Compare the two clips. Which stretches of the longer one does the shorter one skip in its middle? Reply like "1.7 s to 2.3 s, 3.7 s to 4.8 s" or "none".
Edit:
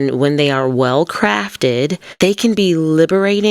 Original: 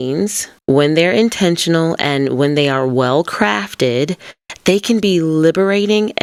4.2 s to 4.5 s